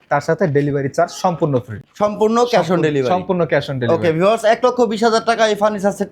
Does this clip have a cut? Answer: no; 0 cuts

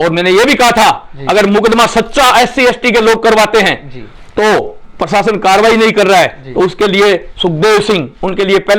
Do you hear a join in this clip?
no; 0 cuts

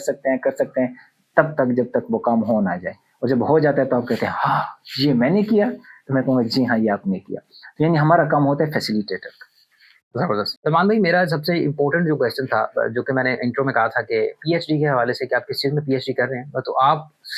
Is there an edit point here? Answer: no; 0 cuts

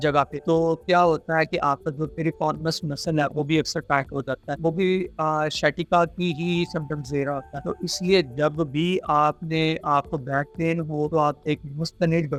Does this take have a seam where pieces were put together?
no; 0 cuts

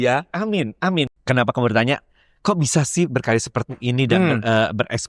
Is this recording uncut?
no; 1 cut; at 1.1 s

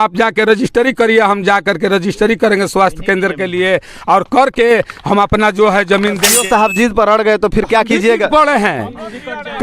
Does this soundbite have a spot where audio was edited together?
yes; 1 cut; at 6.3 s

